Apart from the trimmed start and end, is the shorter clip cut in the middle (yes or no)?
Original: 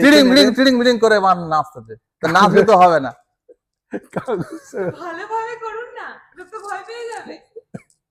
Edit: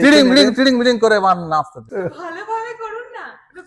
yes